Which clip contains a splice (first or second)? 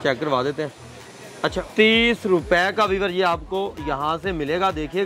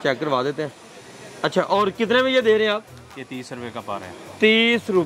first